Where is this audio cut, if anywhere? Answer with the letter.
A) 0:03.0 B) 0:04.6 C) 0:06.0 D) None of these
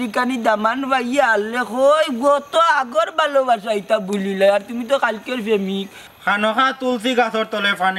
C